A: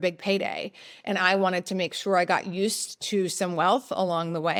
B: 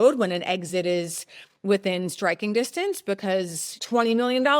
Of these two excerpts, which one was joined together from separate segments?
B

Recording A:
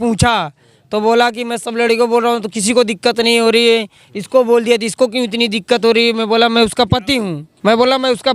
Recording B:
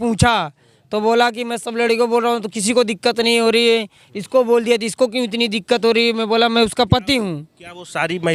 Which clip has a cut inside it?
A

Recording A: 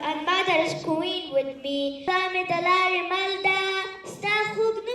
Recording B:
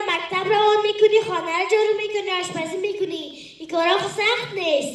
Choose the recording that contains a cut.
A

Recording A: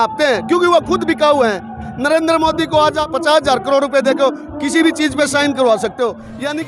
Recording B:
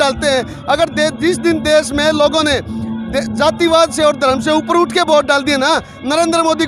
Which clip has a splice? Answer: A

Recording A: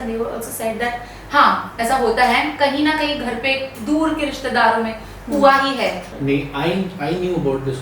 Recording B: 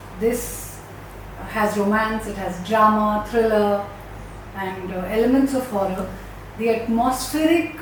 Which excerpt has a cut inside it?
A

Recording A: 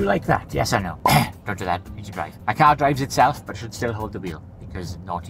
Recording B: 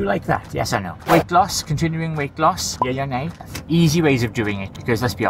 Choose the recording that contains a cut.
B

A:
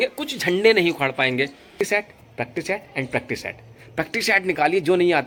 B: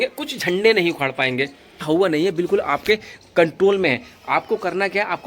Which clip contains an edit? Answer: B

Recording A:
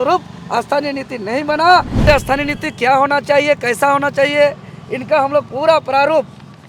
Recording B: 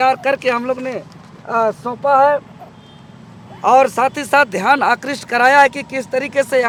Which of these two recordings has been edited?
A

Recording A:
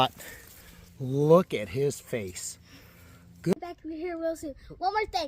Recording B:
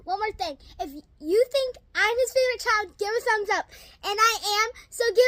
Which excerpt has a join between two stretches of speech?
A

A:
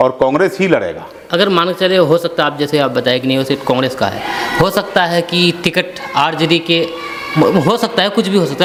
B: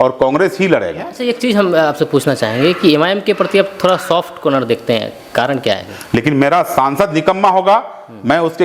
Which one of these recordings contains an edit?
B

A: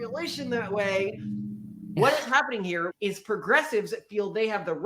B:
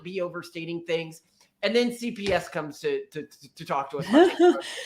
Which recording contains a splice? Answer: A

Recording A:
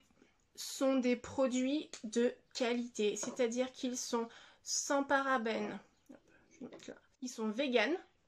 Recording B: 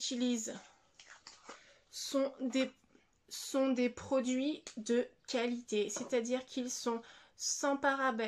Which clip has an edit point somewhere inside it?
A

